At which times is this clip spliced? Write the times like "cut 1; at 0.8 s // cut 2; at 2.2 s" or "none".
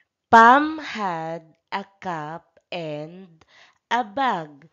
cut 1; at 1.7 s